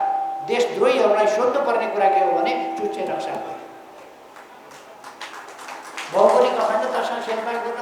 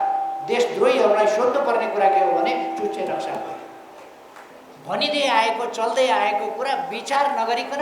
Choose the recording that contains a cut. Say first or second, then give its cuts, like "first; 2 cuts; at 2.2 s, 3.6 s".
second; 1 cut; at 4.5 s